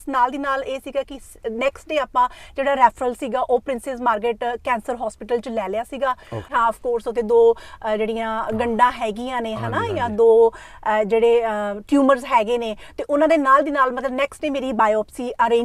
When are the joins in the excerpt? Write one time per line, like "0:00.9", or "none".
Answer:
0:06.4